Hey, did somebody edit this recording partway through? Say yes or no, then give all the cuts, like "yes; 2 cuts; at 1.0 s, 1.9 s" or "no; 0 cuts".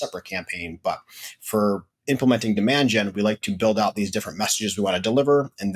no; 0 cuts